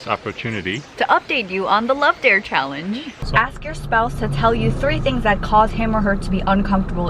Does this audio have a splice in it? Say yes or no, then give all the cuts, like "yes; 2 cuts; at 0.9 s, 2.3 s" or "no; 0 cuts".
yes; 2 cuts; at 0.9 s, 3.2 s